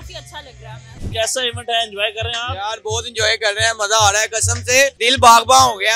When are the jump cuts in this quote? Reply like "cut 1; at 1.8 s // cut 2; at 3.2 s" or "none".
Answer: cut 1; at 1.0 s // cut 2; at 5.0 s